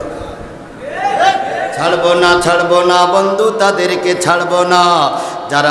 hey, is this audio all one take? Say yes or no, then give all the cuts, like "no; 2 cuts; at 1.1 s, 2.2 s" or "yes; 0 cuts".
no; 1 cut; at 1.7 s